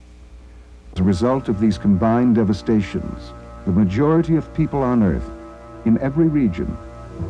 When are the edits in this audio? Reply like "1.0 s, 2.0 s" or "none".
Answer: 1.0 s